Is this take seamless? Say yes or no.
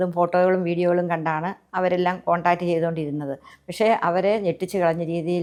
yes